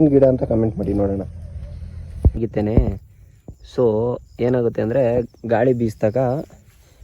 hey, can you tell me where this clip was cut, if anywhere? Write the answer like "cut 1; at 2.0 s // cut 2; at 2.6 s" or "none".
cut 1; at 2.4 s